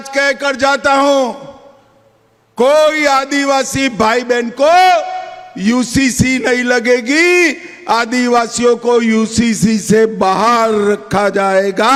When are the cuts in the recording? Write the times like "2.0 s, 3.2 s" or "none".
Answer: none